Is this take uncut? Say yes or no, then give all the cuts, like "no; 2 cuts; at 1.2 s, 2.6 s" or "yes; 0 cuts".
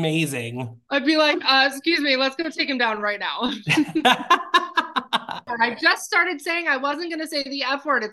yes; 0 cuts